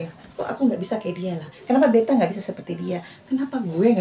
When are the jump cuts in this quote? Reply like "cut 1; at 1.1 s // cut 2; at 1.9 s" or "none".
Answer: none